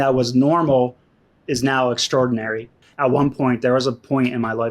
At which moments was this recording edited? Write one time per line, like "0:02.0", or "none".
0:02.8